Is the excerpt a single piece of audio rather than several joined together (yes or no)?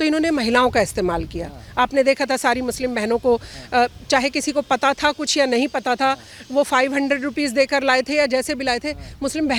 yes